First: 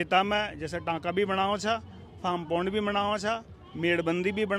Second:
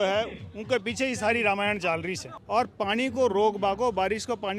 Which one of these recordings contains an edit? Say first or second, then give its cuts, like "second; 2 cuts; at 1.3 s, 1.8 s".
second; 1 cut; at 2.3 s